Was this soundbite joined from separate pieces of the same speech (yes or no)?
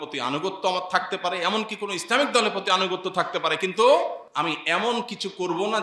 yes